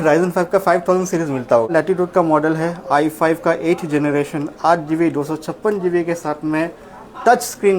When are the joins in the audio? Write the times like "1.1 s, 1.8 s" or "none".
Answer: 1.7 s